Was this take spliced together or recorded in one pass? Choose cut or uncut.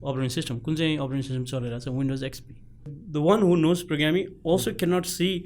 cut